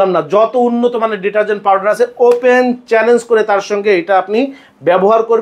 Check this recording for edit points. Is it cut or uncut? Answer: uncut